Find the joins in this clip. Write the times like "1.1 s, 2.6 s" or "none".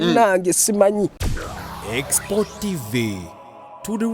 1.3 s